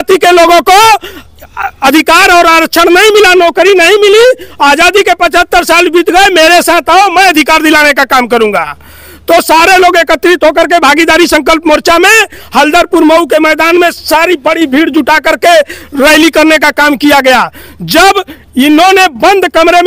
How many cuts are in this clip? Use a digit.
0